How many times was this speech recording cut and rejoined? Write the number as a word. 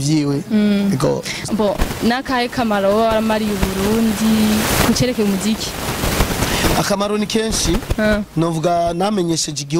one